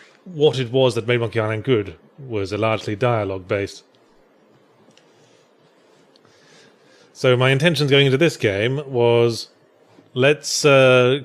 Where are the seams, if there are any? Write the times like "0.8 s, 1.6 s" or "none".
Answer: 6.0 s